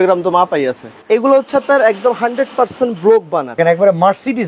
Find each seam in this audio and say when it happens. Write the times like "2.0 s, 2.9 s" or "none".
1.0 s, 3.5 s